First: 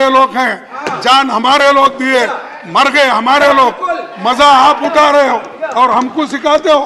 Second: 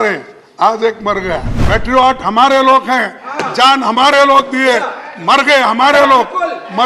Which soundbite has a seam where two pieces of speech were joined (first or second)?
second